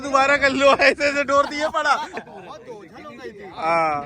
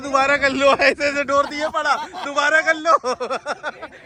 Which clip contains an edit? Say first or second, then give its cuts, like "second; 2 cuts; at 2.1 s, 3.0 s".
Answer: first; 1 cut; at 2.2 s